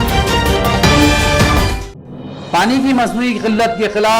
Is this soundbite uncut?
no; 1 cut; at 1.8 s

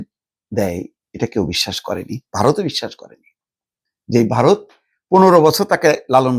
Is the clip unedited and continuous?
yes; 0 cuts

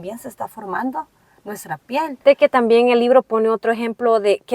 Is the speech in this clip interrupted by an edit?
yes; 1 cut; at 2.2 s

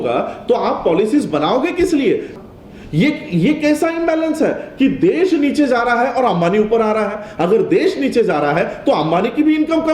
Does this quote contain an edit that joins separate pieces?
yes; 1 cut; at 2.3 s

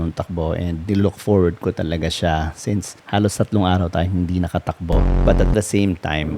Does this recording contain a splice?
yes; 1 cut; at 5.1 s

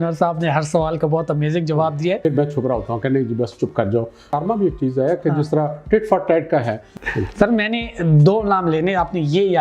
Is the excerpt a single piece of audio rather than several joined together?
no; 3 cuts; at 2.2 s, 4.3 s, 6.8 s

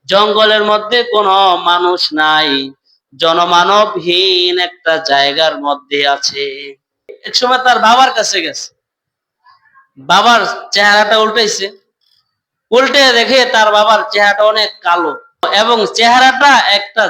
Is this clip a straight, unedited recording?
no; 2 cuts; at 7.2 s, 15.5 s

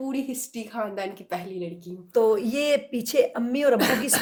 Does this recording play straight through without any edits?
yes; 0 cuts

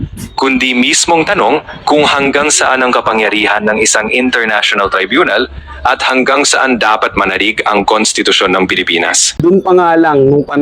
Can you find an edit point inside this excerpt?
yes; 1 cut; at 9.2 s

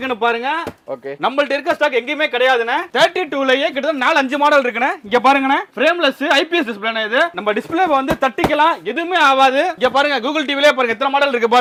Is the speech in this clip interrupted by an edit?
no; 0 cuts

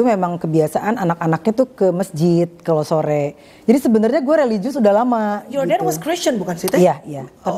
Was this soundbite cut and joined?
no; 0 cuts

